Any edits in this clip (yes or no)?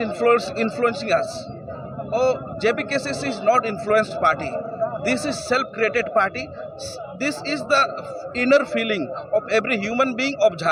no